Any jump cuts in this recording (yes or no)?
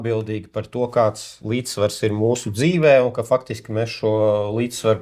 no